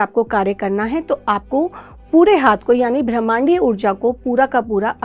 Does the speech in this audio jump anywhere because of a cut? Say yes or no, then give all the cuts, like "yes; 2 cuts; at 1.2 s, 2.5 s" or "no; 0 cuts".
no; 0 cuts